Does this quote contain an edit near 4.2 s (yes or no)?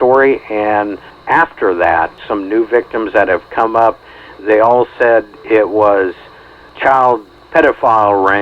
no